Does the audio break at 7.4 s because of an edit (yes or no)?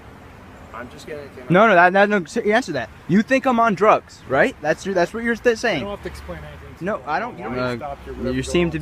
yes